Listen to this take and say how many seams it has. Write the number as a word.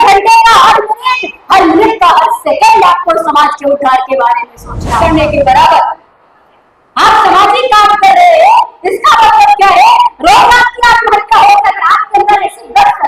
one